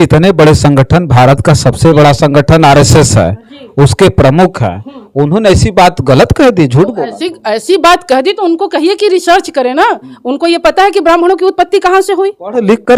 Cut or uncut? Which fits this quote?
uncut